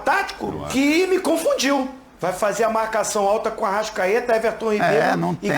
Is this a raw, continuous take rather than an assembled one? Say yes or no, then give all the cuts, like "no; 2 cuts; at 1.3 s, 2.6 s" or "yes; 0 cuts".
no; 1 cut; at 2.1 s